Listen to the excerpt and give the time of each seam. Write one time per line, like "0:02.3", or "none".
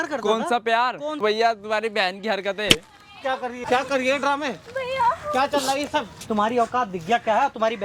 0:01.2
0:03.6
0:06.2